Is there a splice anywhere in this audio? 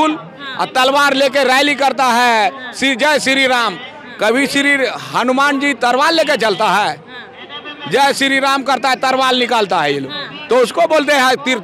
no; 0 cuts

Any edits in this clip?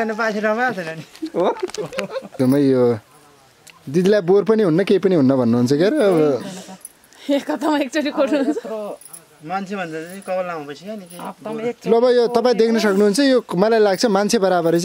yes; 1 cut; at 2.3 s

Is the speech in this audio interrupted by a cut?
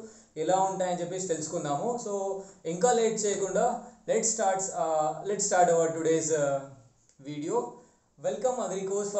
no; 0 cuts

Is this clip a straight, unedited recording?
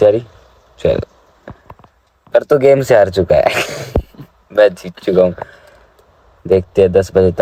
yes; 0 cuts

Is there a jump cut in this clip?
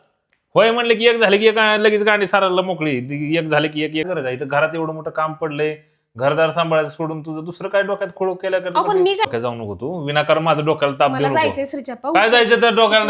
yes; 2 cuts; at 4.1 s, 9.3 s

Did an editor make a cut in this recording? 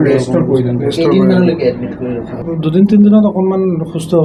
no; 0 cuts

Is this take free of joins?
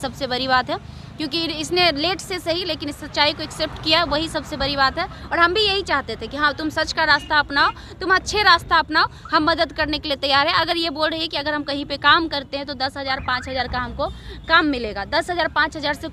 yes; 0 cuts

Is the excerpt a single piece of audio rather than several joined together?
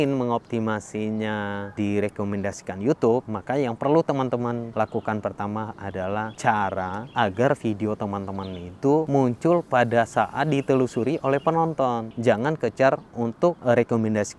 no; 8 cuts; at 1.7 s, 3.3 s, 4.7 s, 6.1 s, 7.0 s, 9.1 s, 12.1 s, 13.6 s

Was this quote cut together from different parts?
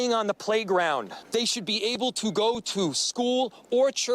yes; 1 cut; at 1.2 s

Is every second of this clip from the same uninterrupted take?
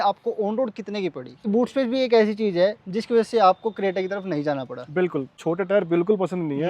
no; 2 cuts; at 1.4 s, 5.3 s

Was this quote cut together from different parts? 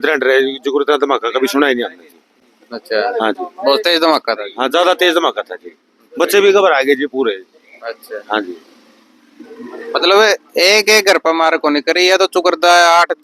no; 0 cuts

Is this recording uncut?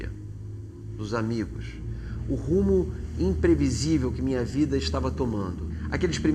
no; 1 cut; at 1.0 s

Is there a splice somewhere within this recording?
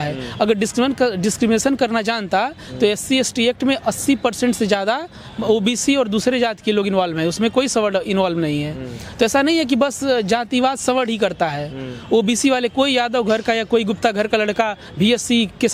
no; 0 cuts

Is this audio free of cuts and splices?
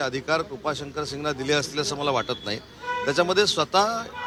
yes; 0 cuts

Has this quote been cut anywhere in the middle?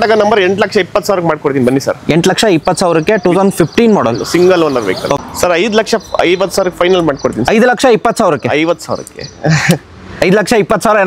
yes; 1 cut; at 5.2 s

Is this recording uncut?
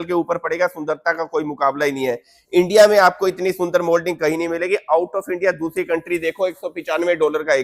yes; 0 cuts

